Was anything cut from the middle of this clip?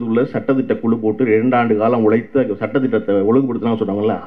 no; 0 cuts

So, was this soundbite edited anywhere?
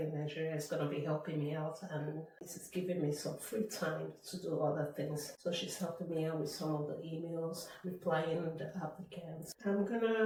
no; 0 cuts

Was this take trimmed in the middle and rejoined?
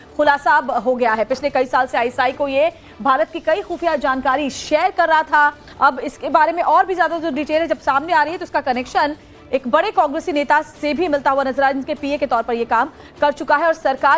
no; 0 cuts

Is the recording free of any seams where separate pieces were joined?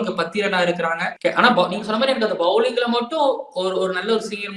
no; 1 cut; at 1.1 s

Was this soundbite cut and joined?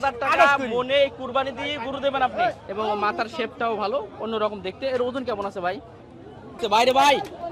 yes; 2 cuts; at 2.6 s, 6.6 s

